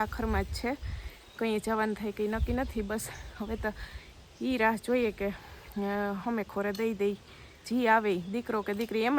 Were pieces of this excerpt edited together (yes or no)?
no